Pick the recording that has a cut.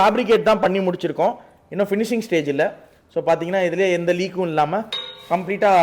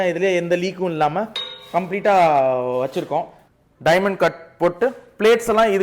second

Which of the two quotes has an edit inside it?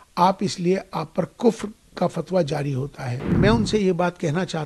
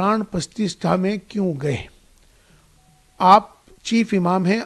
first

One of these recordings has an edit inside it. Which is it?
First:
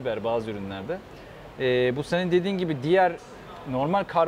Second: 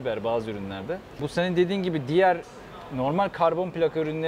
second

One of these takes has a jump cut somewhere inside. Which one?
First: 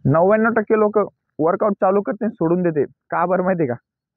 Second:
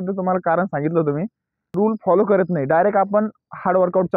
second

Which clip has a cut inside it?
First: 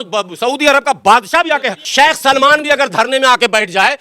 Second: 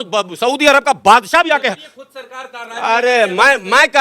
first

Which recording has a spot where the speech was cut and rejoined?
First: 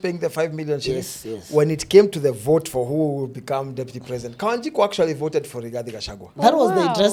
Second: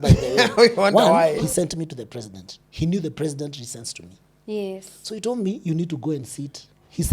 second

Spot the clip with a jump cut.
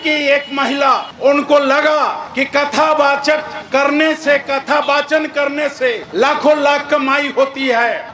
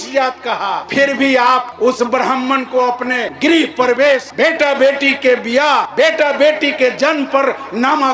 second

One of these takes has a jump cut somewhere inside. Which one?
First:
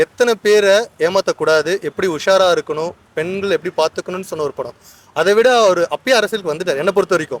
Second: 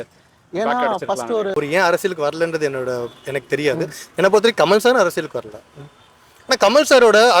second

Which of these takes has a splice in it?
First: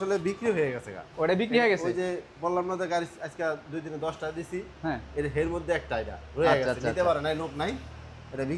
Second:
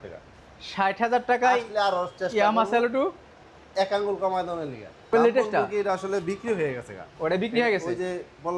second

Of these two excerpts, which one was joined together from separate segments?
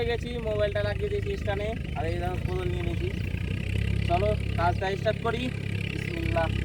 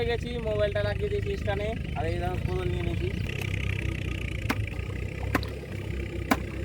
second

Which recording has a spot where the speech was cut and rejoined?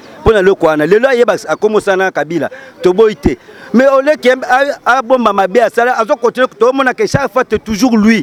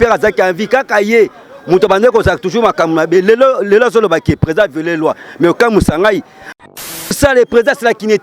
second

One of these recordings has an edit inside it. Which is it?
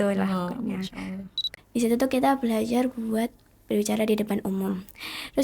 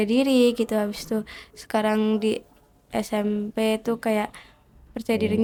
first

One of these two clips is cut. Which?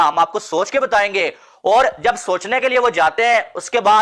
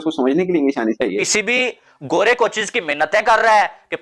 second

